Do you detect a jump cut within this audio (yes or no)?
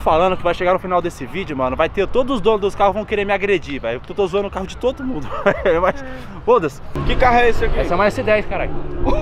yes